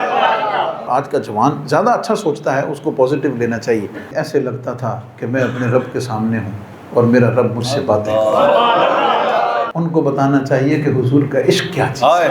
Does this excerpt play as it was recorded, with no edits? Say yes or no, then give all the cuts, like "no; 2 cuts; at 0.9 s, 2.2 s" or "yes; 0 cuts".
no; 3 cuts; at 0.9 s, 4.1 s, 9.7 s